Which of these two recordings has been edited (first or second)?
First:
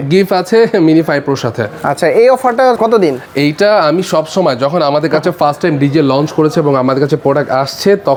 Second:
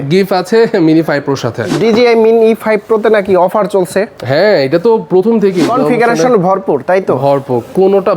second